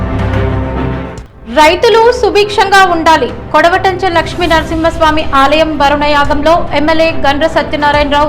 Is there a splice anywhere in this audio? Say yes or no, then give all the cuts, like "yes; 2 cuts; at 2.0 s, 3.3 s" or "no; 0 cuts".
no; 0 cuts